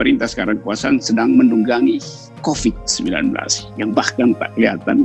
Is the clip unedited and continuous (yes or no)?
yes